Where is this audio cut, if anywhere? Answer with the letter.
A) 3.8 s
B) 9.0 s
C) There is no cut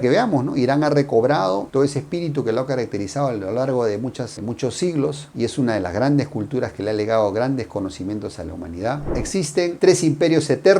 B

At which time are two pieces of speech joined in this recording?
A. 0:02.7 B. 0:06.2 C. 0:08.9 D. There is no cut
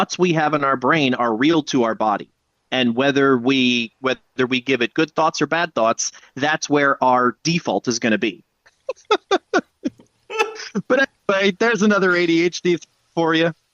C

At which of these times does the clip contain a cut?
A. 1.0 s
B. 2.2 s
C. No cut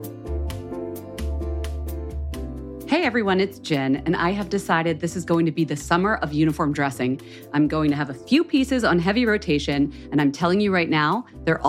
B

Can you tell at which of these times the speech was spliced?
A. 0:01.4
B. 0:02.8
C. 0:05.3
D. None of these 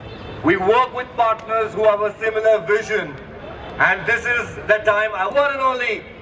C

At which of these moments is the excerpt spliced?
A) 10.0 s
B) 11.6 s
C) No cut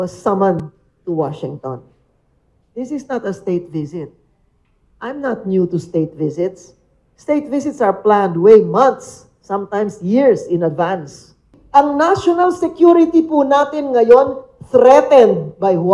B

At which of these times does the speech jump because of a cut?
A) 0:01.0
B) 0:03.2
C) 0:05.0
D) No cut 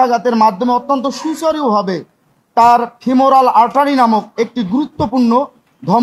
D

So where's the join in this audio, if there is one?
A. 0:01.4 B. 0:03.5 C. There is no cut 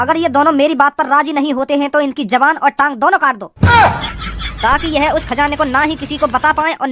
B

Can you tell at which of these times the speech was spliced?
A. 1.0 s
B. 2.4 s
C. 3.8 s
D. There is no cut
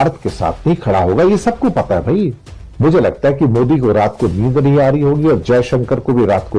B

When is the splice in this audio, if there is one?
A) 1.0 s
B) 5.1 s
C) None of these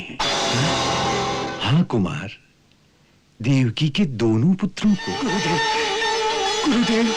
B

